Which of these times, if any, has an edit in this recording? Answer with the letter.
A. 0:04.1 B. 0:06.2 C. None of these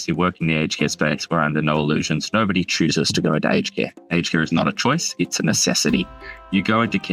C